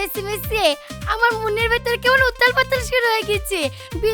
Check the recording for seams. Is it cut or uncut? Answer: uncut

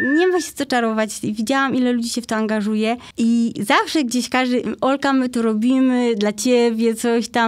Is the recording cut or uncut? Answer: cut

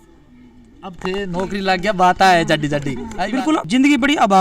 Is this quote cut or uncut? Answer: cut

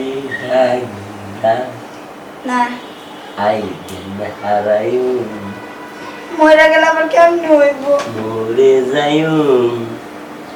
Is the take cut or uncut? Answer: uncut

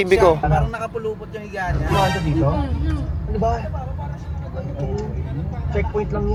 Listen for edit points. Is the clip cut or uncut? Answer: uncut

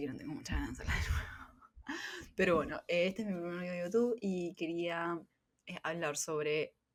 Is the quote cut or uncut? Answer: uncut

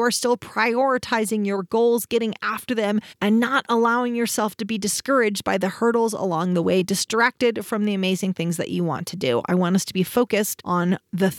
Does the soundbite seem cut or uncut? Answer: uncut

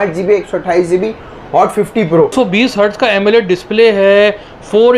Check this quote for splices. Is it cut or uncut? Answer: cut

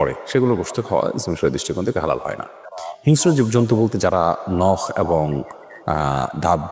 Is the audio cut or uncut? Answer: uncut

